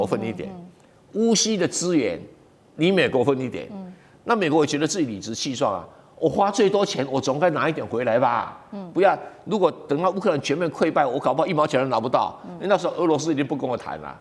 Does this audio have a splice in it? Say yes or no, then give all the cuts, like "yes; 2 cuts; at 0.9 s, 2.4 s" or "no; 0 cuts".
no; 0 cuts